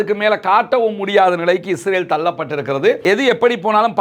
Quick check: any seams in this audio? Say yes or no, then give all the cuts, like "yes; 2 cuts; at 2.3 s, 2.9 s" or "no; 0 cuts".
yes; 1 cut; at 3.0 s